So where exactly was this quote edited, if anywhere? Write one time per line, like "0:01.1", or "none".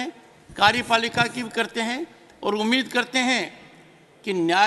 none